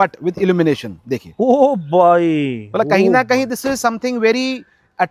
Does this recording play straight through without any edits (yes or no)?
yes